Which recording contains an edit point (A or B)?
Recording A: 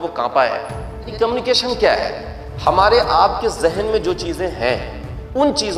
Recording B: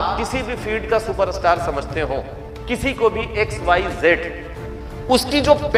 A